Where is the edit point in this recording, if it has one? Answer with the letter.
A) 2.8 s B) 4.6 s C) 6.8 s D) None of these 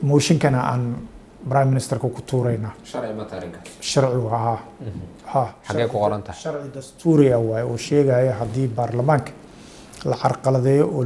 D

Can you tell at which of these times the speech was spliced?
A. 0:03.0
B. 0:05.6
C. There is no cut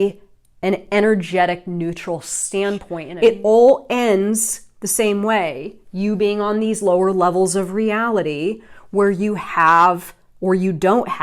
A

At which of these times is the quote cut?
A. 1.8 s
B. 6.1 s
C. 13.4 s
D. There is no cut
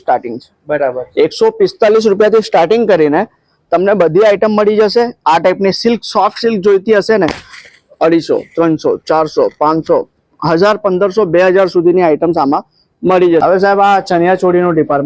C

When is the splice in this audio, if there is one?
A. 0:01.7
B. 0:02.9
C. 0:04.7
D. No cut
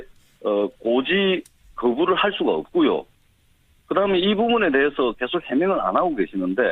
C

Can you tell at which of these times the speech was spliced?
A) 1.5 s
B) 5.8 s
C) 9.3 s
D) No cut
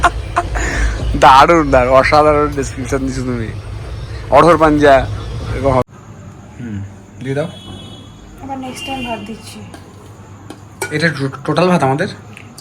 B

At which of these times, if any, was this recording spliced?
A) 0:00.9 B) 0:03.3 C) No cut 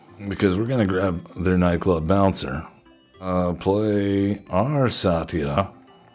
B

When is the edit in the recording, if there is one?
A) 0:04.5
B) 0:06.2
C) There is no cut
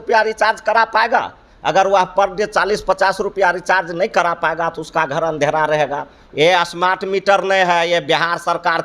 B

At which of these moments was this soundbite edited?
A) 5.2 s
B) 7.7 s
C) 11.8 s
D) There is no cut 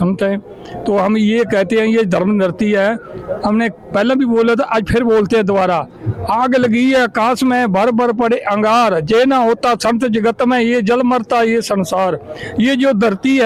D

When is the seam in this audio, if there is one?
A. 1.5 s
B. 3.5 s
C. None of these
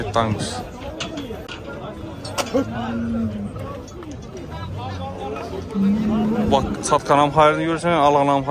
A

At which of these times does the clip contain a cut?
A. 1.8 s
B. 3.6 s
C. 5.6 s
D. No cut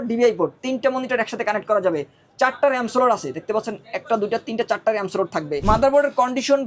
C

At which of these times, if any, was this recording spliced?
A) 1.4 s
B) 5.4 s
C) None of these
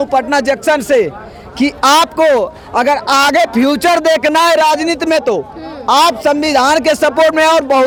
C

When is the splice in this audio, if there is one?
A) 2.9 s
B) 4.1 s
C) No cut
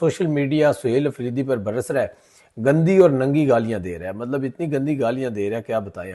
C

